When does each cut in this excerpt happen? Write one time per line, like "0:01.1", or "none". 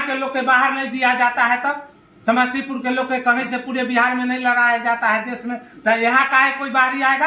none